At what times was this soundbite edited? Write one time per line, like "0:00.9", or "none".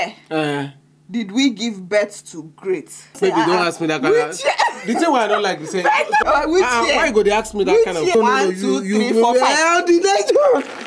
0:03.1
0:06.2
0:08.1